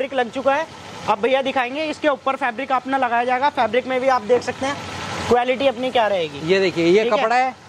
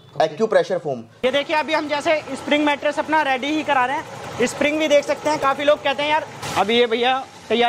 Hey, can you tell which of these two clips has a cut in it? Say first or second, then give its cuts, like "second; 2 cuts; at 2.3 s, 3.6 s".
second; 2 cuts; at 1.1 s, 6.4 s